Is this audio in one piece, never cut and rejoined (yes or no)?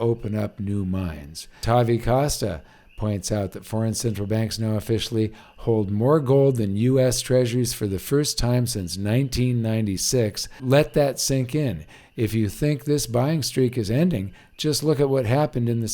no